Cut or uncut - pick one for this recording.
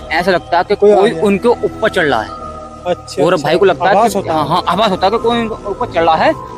uncut